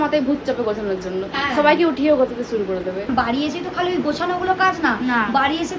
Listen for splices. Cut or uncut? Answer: cut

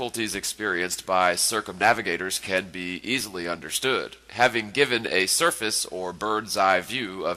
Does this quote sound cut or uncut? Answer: cut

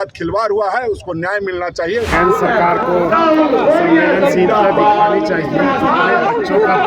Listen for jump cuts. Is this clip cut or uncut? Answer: cut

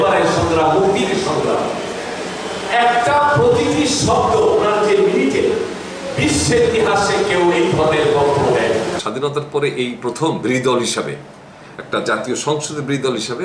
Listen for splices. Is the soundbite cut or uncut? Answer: cut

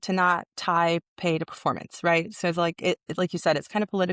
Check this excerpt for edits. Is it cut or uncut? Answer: uncut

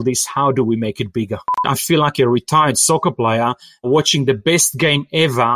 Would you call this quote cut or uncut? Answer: cut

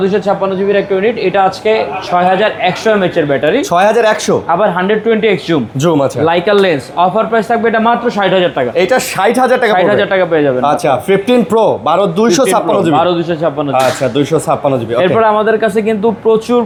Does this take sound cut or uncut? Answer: uncut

